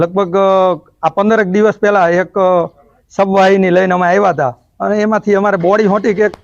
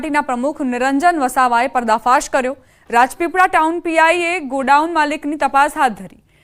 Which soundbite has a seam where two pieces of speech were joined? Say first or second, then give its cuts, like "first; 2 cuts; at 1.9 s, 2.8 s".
first; 1 cut; at 5.0 s